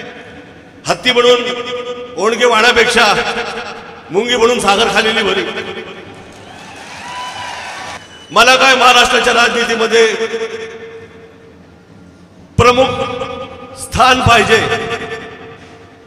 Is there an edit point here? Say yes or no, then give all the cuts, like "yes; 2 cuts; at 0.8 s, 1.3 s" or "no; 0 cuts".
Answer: yes; 1 cut; at 8.0 s